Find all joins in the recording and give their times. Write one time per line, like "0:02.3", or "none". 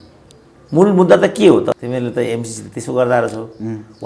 0:01.8